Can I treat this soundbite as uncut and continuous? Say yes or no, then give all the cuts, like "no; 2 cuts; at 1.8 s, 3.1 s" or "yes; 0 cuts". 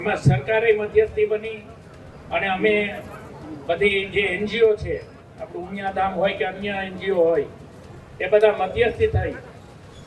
yes; 0 cuts